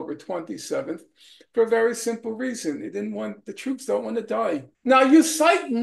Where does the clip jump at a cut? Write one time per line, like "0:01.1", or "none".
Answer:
0:04.7